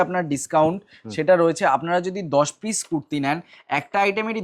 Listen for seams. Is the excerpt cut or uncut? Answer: uncut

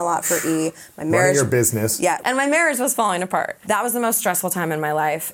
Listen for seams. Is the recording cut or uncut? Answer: cut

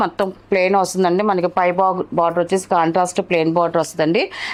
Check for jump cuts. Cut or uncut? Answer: uncut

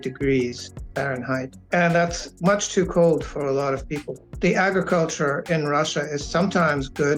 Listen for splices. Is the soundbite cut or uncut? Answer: cut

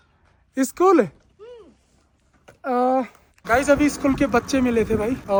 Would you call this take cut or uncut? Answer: uncut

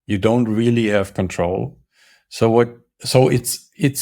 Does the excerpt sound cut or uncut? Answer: uncut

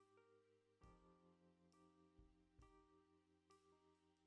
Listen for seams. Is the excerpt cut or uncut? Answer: uncut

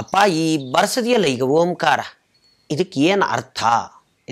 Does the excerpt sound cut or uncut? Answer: uncut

